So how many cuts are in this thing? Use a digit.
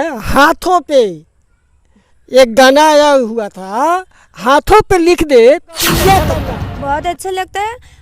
1